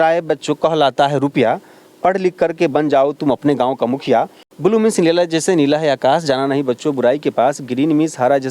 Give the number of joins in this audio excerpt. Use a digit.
1